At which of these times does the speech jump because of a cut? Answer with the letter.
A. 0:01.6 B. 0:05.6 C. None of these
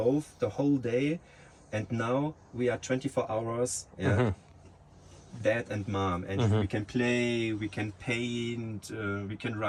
C